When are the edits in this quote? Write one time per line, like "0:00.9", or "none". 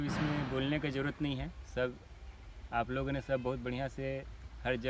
none